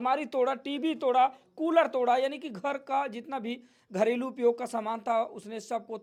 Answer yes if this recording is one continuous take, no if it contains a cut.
yes